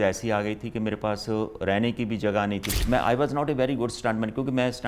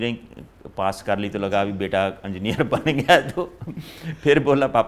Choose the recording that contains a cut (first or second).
first